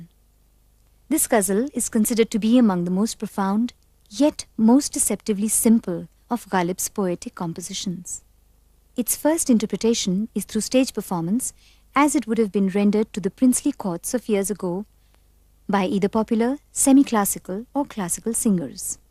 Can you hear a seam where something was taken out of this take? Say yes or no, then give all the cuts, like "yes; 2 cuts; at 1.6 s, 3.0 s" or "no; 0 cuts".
yes; 1 cut; at 13.6 s